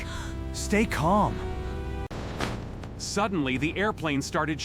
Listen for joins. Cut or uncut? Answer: cut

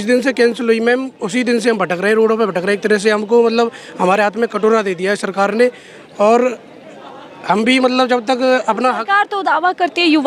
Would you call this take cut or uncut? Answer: uncut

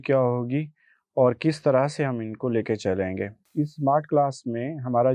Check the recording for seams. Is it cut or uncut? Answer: cut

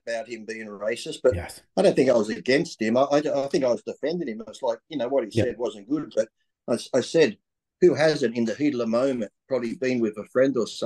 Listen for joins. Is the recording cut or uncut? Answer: uncut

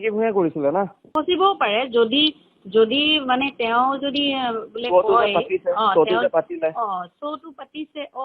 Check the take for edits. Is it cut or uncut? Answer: cut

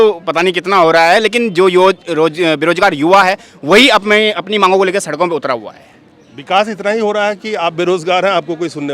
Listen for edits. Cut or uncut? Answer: uncut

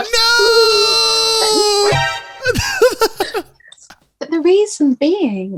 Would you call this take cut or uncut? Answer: uncut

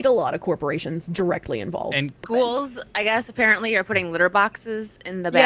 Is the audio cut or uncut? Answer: cut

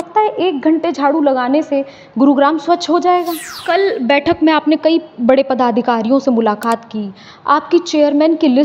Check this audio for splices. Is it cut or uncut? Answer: cut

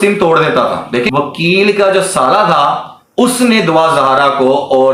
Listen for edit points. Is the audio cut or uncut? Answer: cut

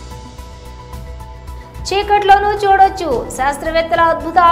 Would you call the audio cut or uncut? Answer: cut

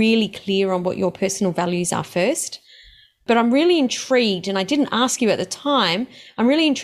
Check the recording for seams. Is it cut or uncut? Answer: uncut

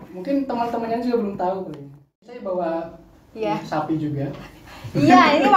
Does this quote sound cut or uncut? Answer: cut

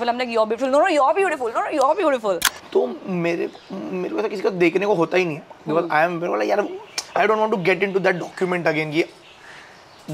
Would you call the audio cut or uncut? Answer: cut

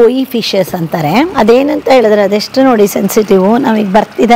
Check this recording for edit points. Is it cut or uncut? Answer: cut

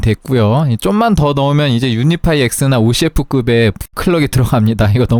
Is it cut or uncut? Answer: uncut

